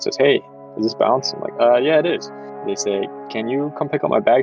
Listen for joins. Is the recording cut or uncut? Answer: cut